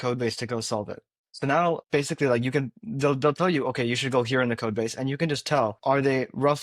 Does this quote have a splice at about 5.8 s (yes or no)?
yes